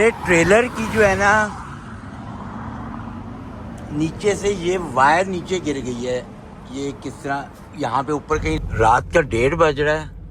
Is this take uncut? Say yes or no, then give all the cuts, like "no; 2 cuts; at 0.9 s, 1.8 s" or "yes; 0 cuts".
no; 1 cut; at 8.6 s